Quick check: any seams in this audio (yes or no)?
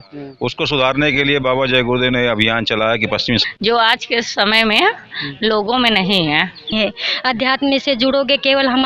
yes